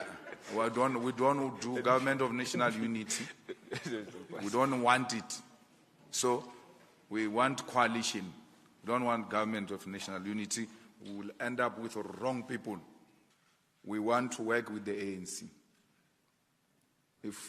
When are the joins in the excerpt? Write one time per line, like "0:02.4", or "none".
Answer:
0:13.6

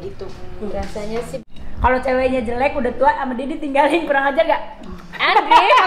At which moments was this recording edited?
0:01.4

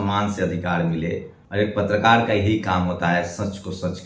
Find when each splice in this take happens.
0:01.4

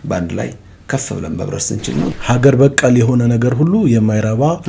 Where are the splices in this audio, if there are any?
0:02.1

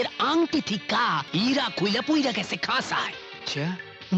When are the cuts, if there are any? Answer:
0:01.3

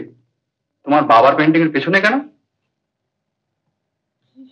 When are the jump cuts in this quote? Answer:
none

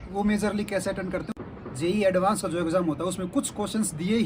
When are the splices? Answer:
0:01.3

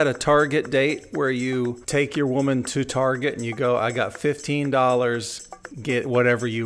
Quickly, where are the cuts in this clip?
0:01.8

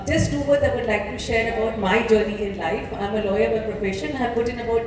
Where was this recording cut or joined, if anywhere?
none

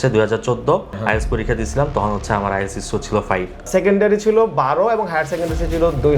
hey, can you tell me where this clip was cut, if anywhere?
0:00.9
0:03.7

